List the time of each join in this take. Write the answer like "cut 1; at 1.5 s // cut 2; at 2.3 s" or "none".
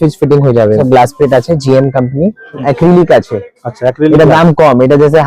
cut 1; at 0.8 s // cut 2; at 2.6 s